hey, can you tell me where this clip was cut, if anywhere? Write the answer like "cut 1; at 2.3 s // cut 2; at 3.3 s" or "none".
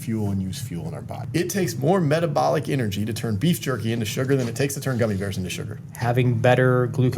cut 1; at 1.2 s // cut 2; at 5.9 s